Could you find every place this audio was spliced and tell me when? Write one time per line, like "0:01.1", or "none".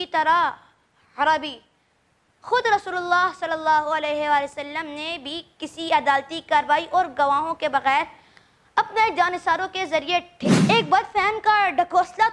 0:10.4

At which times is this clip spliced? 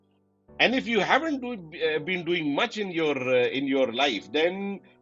none

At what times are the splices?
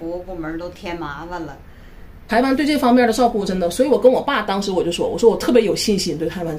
0:02.2

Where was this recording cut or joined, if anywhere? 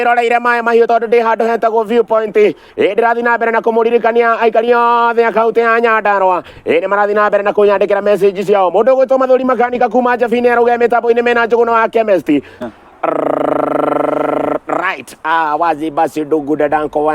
0:12.6

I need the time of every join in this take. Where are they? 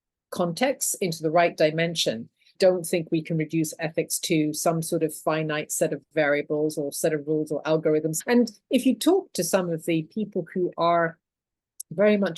0:02.5
0:08.1

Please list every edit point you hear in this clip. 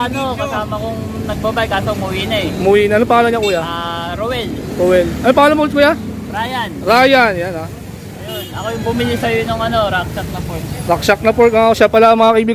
none

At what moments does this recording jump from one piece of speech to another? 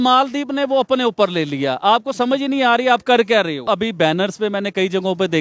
0:03.7

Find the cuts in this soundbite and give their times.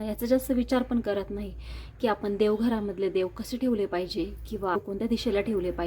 0:04.8

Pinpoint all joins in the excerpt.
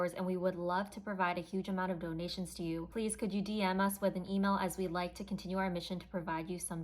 0:02.9

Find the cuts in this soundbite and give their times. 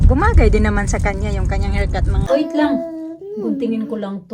0:02.3

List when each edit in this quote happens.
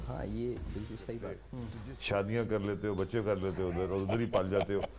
0:01.5

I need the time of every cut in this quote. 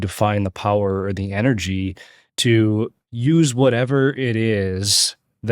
0:03.0

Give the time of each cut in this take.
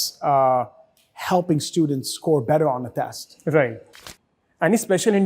0:03.8

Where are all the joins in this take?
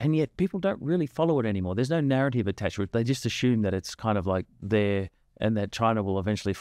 none

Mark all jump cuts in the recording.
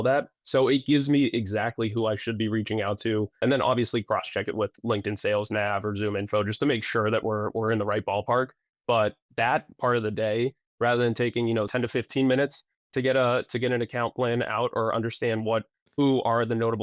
0:03.4
0:11.7

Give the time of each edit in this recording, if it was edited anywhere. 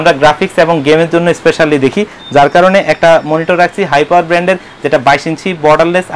none

